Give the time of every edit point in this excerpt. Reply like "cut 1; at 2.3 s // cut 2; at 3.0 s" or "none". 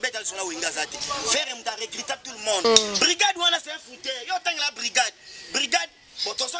cut 1; at 2.6 s